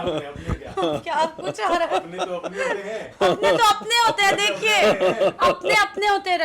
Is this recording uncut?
yes; 0 cuts

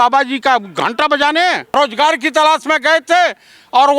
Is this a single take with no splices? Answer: no; 1 cut; at 1.8 s

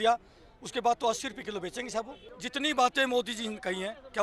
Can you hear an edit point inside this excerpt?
yes; 1 cut; at 2.4 s

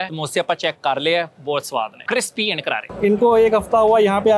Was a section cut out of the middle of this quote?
yes; 1 cut; at 2.9 s

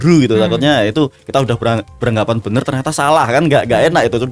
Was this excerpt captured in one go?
yes; 0 cuts

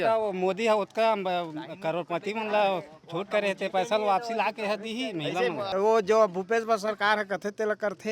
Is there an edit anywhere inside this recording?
yes; 1 cut; at 5.7 s

